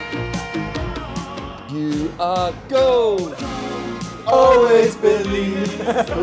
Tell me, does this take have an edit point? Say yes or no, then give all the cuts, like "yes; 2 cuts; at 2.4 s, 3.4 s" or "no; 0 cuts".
no; 0 cuts